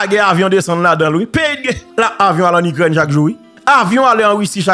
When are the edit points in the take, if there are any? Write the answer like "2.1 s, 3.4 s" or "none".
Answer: 1.8 s, 3.5 s